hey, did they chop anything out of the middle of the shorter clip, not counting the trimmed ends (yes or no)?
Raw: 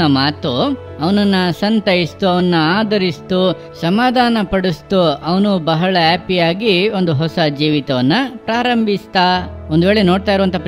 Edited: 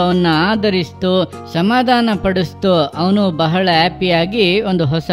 no